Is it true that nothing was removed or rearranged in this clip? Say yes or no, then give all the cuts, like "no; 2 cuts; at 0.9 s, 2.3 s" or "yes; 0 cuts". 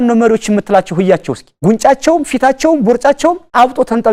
yes; 0 cuts